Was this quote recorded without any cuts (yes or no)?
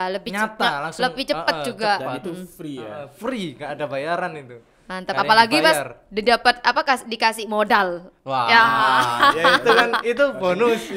yes